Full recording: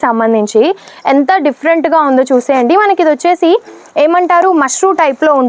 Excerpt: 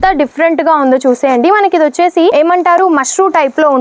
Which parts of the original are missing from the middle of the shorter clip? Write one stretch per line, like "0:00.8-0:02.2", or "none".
0:03.6-0:04.0